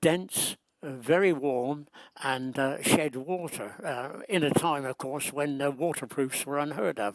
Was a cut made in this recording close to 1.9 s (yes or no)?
no